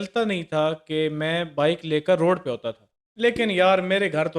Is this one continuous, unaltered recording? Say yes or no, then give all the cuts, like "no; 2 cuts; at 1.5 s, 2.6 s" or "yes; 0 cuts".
no; 1 cut; at 2.9 s